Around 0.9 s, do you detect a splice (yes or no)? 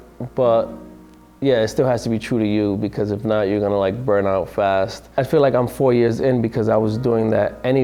no